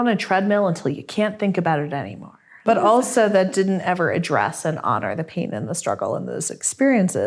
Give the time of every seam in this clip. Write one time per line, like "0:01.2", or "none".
0:02.5